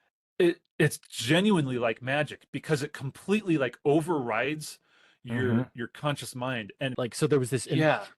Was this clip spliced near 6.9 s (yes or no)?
yes